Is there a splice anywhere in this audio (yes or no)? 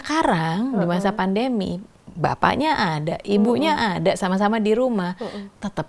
no